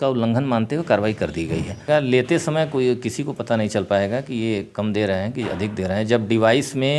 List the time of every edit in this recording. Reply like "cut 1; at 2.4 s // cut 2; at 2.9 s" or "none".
cut 1; at 1.9 s